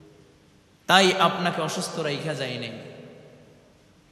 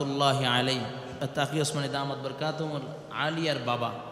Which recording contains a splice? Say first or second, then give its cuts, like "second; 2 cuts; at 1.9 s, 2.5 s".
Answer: second; 1 cut; at 1.3 s